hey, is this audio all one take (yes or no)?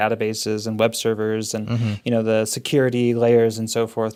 yes